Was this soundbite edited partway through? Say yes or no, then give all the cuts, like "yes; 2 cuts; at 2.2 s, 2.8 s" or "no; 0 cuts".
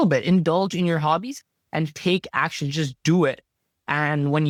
no; 0 cuts